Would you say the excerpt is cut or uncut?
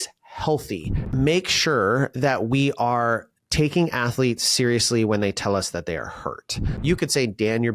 cut